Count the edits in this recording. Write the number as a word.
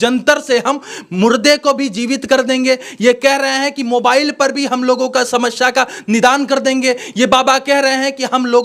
zero